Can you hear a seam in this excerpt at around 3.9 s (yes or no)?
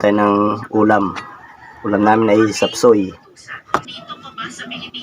yes